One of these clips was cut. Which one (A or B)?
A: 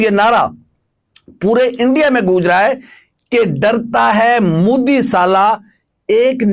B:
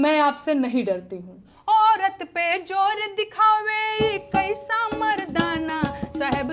B